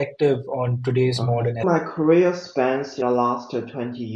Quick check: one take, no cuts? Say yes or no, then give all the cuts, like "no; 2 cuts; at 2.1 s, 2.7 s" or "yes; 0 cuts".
no; 2 cuts; at 1.6 s, 3.0 s